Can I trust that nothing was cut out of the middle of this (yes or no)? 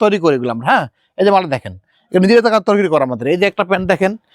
yes